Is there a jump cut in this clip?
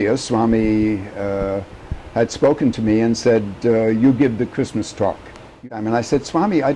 yes; 1 cut; at 5.7 s

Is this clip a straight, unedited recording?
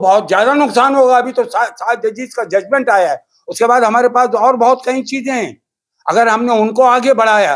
yes; 0 cuts

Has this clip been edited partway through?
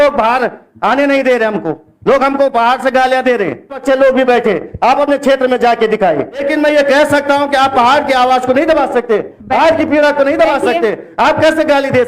yes; 2 cuts; at 3.8 s, 6.5 s

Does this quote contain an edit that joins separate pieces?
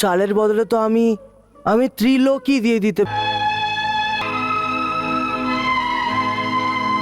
yes; 2 cuts; at 3.1 s, 4.2 s

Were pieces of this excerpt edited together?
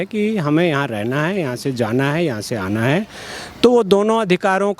no; 0 cuts

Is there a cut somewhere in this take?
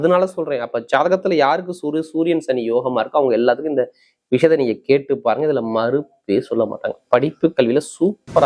no; 0 cuts

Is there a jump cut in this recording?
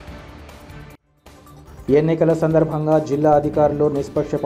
yes; 1 cut; at 1.5 s

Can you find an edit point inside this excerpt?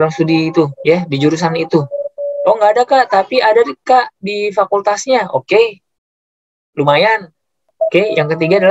yes; 1 cut; at 7.7 s

